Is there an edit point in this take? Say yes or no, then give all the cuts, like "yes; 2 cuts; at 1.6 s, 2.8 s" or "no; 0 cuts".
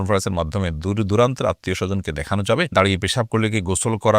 yes; 1 cut; at 2.7 s